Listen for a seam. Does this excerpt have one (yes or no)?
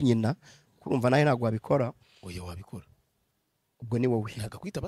no